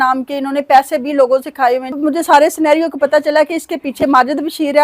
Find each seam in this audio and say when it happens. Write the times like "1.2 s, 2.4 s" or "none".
1.9 s